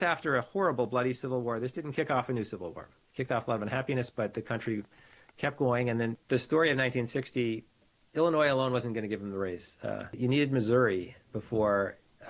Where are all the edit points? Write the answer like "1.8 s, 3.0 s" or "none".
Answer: 6.2 s, 7.9 s, 10.1 s